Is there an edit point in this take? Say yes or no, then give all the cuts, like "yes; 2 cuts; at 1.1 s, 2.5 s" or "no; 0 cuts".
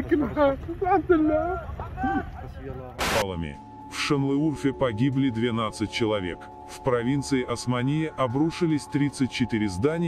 yes; 1 cut; at 3.1 s